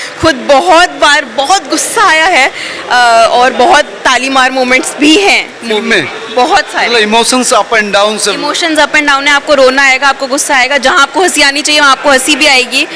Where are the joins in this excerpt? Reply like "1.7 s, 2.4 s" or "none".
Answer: none